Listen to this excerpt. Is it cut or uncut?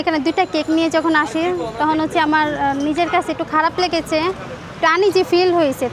uncut